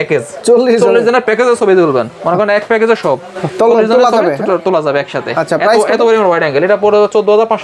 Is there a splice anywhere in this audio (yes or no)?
no